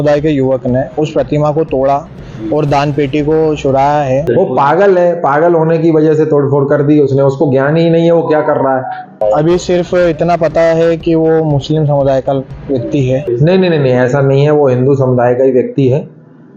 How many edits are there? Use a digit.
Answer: 3